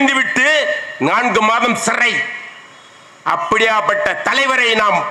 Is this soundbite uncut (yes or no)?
yes